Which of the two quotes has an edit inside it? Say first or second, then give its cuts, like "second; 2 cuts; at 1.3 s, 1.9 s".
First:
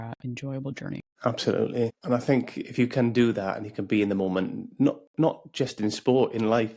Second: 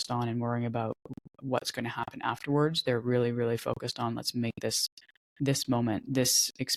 first; 2 cuts; at 1.1 s, 2.0 s